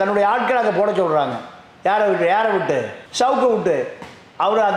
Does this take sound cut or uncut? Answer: uncut